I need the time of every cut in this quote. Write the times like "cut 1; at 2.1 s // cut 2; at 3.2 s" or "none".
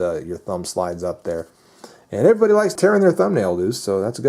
cut 1; at 2.7 s